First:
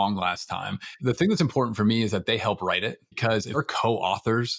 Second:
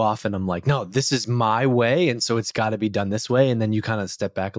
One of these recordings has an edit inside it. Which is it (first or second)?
first